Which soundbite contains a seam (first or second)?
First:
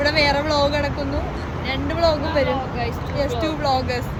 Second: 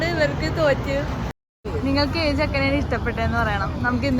second